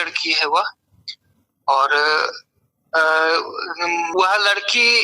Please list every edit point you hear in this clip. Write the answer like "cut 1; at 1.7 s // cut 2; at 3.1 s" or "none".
cut 1; at 4.1 s